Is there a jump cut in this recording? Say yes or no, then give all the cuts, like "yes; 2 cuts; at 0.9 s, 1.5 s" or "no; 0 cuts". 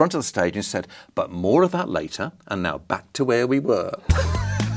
no; 0 cuts